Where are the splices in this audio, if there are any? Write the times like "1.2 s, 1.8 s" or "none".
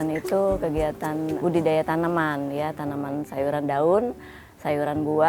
1.4 s, 3.3 s